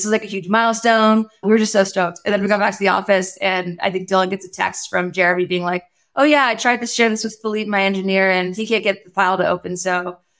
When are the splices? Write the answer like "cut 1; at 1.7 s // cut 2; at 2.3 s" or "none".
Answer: cut 1; at 1.4 s